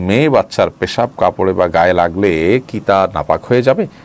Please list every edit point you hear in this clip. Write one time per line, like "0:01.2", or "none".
none